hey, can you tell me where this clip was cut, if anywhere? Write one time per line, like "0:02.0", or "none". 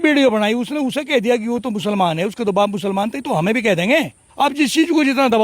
0:04.2